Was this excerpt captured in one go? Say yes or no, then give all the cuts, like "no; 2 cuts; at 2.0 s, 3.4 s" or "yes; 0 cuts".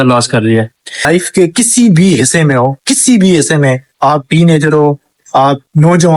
no; 1 cut; at 1.1 s